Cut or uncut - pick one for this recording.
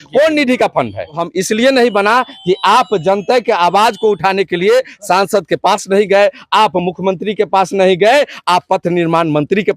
cut